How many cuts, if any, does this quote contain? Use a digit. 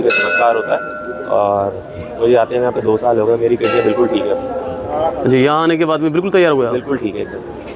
0